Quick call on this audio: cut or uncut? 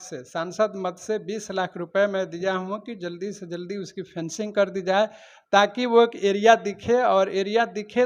uncut